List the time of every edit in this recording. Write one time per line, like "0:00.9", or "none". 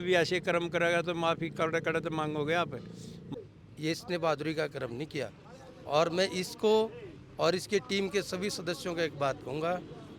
0:03.2